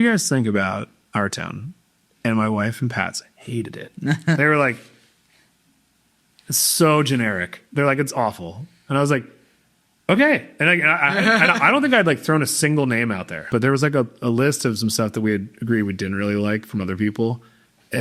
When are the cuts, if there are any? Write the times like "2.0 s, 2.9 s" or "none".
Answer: 13.4 s